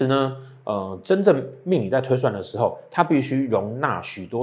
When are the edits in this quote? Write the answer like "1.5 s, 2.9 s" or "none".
none